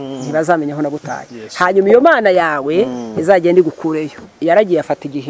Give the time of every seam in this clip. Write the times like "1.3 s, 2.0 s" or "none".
4.1 s